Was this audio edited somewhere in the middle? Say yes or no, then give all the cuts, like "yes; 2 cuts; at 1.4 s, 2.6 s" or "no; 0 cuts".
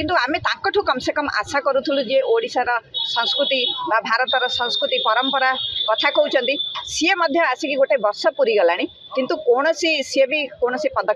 no; 0 cuts